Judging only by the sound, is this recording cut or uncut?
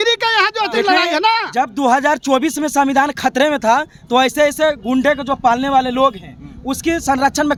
uncut